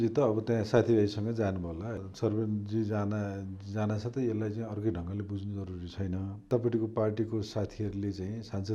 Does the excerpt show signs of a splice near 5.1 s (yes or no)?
no